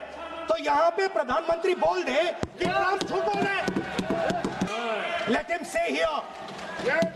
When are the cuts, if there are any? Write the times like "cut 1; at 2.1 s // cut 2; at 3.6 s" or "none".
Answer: cut 1; at 4.7 s